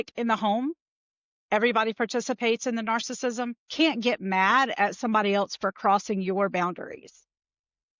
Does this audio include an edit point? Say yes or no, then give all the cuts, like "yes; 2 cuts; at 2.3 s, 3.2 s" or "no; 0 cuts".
yes; 1 cut; at 3.6 s